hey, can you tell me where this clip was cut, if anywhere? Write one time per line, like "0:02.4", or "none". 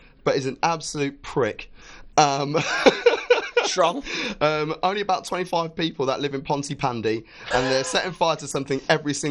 none